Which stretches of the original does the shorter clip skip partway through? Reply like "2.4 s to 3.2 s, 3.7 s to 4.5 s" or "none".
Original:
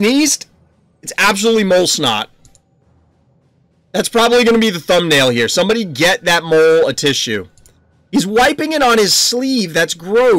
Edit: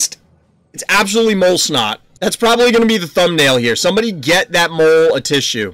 2.3 s to 3.8 s

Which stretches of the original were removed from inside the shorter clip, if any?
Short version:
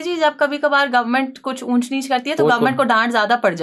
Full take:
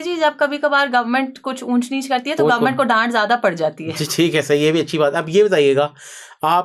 none

